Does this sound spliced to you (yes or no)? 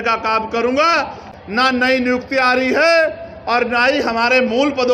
yes